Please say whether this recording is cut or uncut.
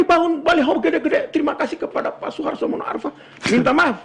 uncut